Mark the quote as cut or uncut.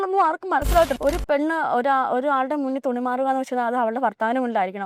cut